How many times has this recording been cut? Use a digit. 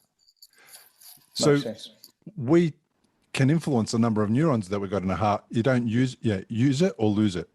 0